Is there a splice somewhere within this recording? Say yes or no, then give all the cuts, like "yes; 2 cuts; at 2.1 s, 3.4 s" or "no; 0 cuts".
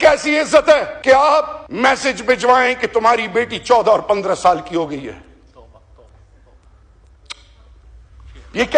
yes; 2 cuts; at 0.9 s, 1.6 s